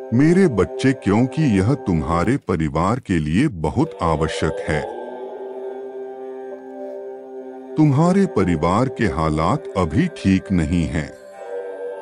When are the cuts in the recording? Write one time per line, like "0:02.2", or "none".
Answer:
0:04.9
0:07.7
0:11.1